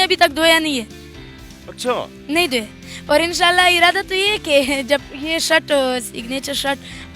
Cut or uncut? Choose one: uncut